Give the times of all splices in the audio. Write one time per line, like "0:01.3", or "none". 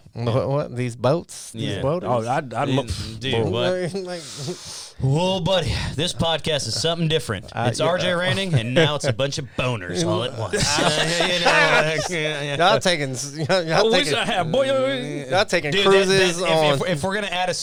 none